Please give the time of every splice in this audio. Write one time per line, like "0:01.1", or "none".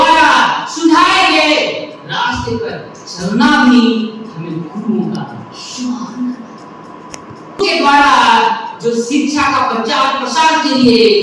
0:07.6